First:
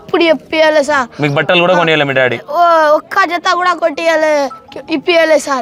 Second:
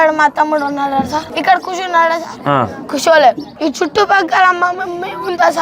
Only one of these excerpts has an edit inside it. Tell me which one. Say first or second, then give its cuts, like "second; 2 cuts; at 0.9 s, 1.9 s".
second; 3 cuts; at 1.3 s, 2.5 s, 3.5 s